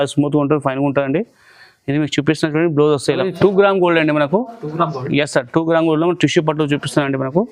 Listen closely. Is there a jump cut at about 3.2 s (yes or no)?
yes